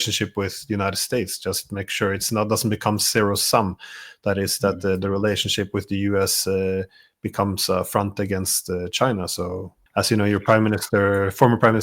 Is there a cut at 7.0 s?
no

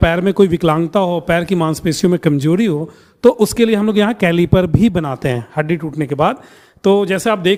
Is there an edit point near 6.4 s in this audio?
no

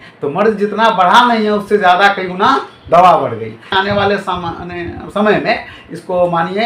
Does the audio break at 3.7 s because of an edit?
yes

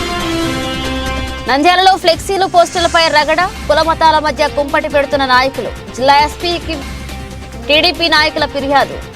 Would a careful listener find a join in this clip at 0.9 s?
yes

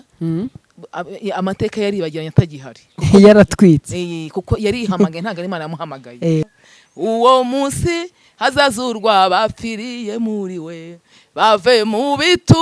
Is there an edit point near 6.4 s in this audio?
yes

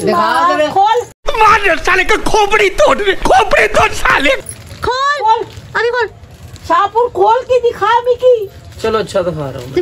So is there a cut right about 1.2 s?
no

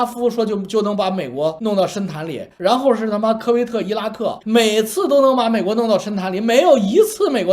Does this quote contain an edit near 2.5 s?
no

